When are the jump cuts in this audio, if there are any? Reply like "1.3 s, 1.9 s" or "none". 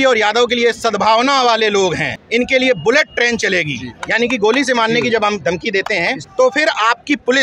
2.1 s, 6.2 s